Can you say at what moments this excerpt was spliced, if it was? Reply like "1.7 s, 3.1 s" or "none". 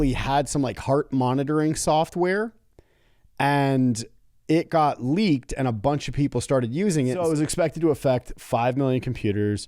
7.2 s